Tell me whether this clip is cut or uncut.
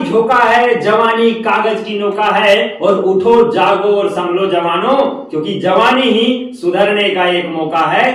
uncut